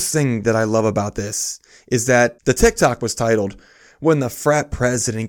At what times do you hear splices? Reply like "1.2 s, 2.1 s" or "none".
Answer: 2.4 s

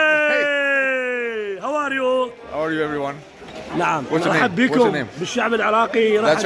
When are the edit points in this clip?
none

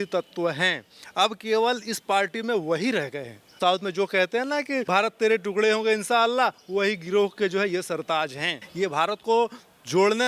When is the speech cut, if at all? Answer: 3.6 s, 4.8 s, 8.7 s

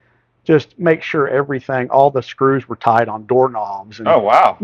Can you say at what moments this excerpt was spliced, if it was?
none

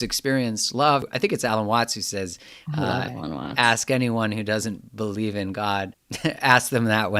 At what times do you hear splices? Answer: 1.0 s, 6.0 s

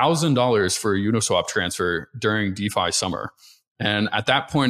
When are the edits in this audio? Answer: none

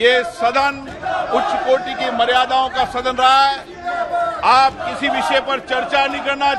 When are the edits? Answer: none

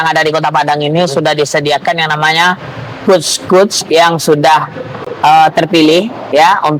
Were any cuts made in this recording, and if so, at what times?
none

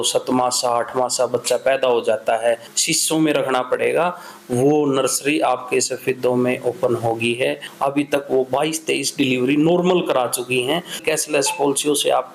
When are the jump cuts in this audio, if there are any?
2.7 s, 7.7 s, 11.0 s

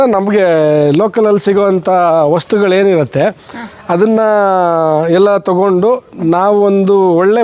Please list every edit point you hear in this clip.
none

